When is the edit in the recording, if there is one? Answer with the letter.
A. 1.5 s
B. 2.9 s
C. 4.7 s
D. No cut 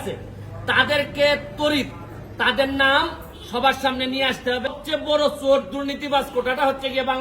C